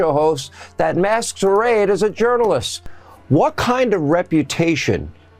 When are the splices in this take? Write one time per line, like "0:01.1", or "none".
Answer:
0:02.7